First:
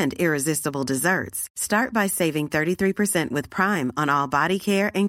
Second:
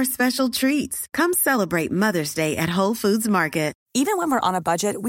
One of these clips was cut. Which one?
second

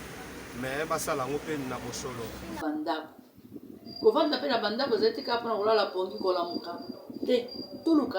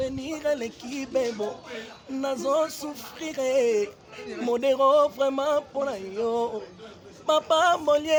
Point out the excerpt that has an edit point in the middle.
first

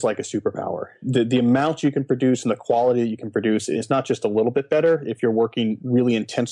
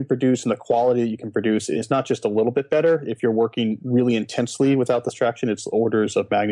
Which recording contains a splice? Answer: first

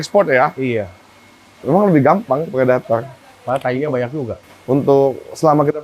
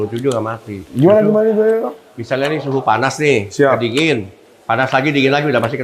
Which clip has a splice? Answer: first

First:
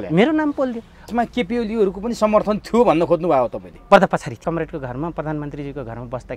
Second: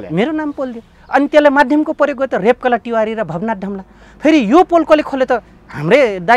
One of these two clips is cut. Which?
first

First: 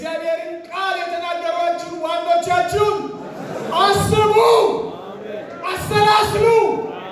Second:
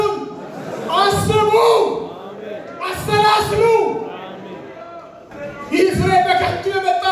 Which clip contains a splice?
second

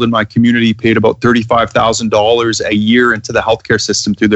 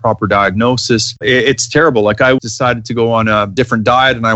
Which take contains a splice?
second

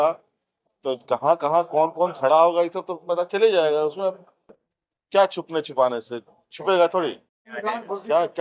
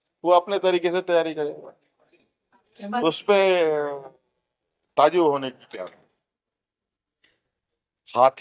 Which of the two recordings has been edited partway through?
first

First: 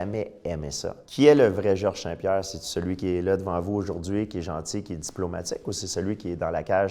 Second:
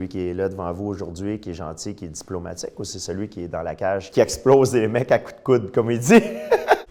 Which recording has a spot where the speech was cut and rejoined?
first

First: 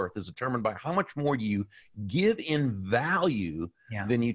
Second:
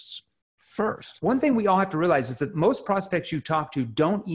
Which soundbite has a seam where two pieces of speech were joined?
second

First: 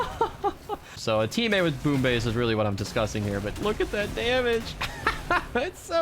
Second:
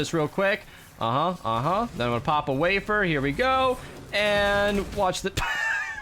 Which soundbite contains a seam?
first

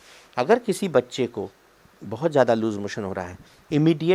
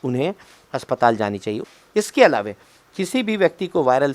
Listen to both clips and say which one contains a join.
second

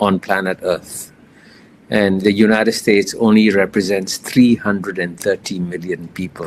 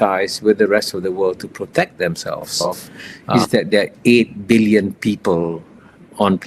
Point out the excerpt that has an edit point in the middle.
second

